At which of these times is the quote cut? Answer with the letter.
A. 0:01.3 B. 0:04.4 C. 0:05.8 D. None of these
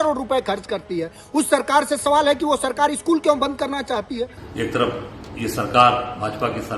B